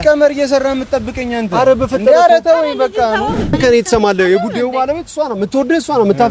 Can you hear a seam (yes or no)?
yes